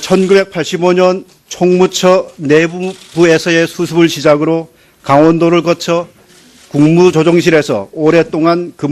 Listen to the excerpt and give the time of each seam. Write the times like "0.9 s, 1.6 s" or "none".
2.2 s

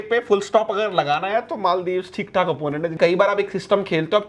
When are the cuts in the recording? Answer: 3.0 s

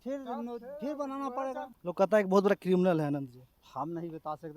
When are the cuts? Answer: 1.7 s

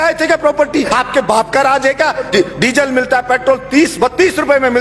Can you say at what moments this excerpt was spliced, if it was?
0.9 s, 2.3 s

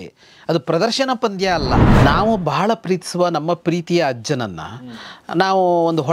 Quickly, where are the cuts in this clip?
1.9 s

